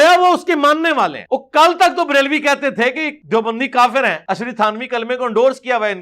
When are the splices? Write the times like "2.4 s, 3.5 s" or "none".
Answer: 1.2 s, 3.1 s, 4.2 s